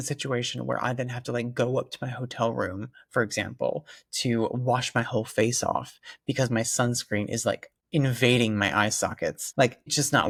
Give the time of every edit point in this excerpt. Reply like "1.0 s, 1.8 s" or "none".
none